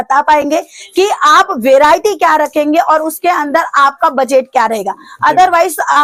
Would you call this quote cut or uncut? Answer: uncut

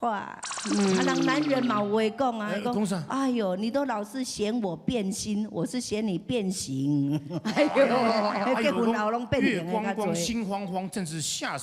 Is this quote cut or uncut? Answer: uncut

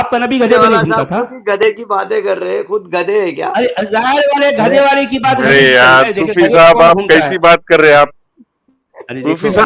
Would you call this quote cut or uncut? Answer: uncut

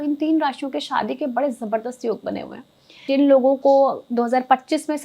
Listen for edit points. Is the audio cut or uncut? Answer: cut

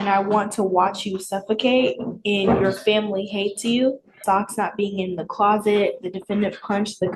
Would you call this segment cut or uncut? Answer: cut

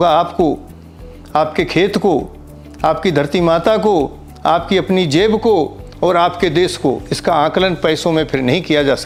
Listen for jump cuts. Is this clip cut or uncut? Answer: uncut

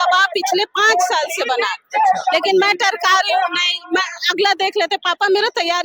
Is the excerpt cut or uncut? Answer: uncut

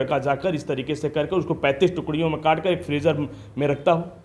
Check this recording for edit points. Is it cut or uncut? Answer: uncut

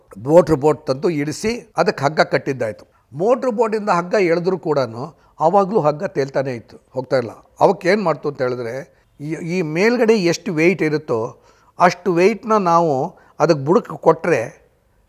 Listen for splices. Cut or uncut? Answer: cut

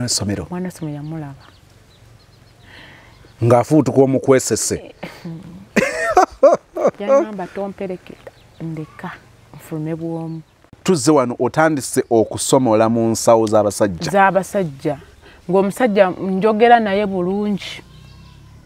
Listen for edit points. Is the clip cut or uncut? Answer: cut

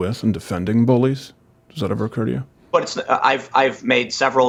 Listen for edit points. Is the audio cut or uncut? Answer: uncut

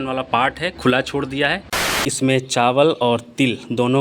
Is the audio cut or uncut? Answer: cut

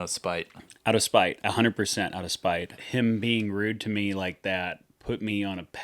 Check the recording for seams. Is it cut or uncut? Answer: cut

